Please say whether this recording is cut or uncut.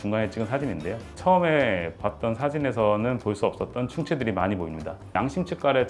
cut